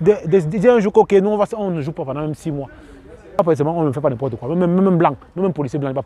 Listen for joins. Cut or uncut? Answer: cut